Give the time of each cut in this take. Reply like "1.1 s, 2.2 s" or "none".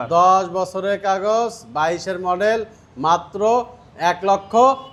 none